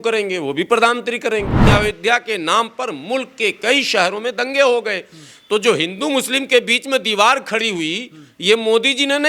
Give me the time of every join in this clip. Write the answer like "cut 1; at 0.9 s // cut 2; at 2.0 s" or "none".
cut 1; at 1.6 s